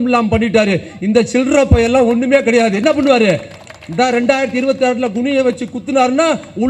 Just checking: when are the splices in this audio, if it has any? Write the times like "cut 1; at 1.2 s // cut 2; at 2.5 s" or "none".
none